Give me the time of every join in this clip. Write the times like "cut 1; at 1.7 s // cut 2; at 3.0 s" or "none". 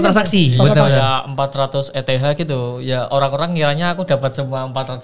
none